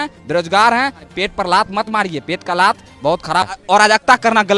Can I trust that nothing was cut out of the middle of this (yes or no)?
no